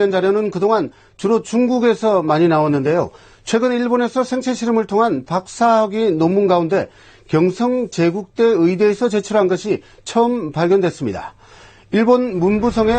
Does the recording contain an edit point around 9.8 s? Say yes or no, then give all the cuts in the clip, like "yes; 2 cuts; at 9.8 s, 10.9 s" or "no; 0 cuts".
no; 1 cut; at 5.5 s